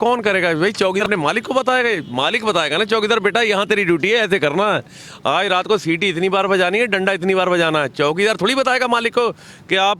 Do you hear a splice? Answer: yes; 1 cut; at 1.0 s

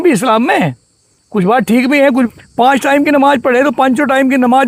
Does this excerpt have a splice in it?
yes; 1 cut; at 2.3 s

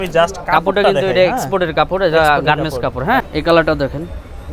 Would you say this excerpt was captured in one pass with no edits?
no; 1 cut; at 3.3 s

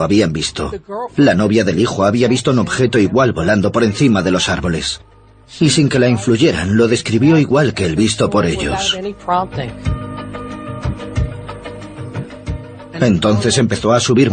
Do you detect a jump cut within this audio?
no; 0 cuts

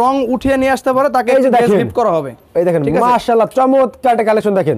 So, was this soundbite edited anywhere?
no; 0 cuts

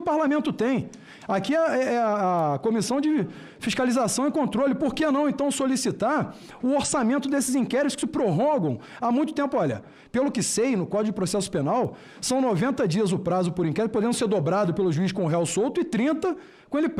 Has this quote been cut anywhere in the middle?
no; 0 cuts

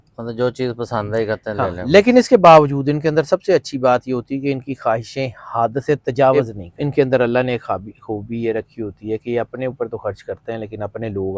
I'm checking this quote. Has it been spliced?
yes; 1 cut; at 6.4 s

